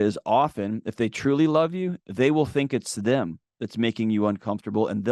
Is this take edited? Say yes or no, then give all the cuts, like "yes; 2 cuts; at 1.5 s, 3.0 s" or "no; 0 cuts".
no; 0 cuts